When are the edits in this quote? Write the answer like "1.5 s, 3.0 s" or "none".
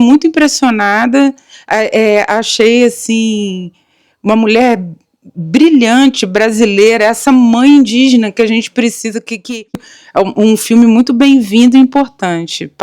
10.0 s

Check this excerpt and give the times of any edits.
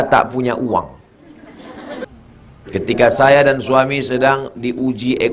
2.1 s

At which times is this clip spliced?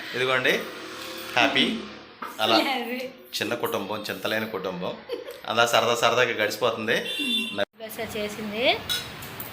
7.6 s

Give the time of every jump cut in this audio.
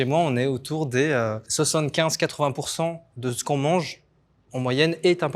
1.4 s

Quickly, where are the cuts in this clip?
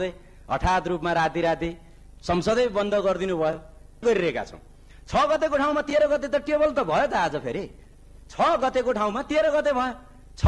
4.0 s

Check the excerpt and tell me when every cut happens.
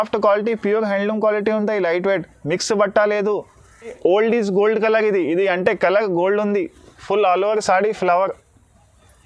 3.9 s

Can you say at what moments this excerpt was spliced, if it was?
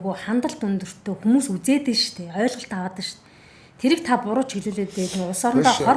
none

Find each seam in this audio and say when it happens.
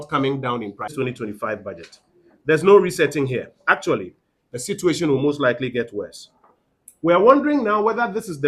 0.9 s

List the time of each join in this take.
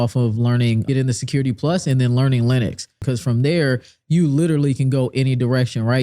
0.8 s, 3.0 s

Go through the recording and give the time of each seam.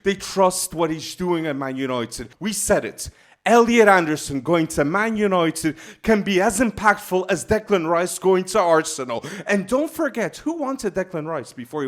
2.3 s

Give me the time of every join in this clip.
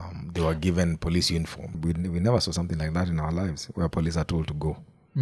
1.8 s

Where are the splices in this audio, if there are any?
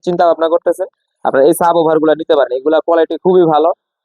none

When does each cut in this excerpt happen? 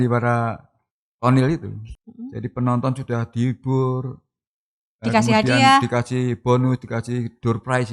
1.8 s

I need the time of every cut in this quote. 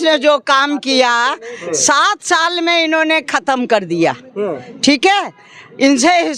none

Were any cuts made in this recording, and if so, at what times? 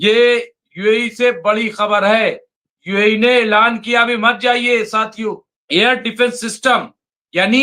5.5 s

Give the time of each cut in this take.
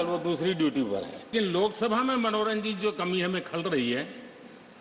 1.3 s

